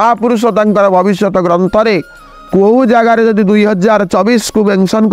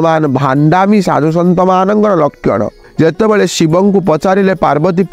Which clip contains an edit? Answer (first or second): second